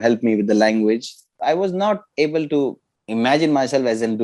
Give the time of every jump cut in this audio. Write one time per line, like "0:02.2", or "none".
0:01.3